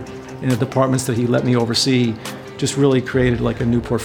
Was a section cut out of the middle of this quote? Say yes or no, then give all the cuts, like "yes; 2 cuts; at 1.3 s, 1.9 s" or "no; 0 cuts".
no; 0 cuts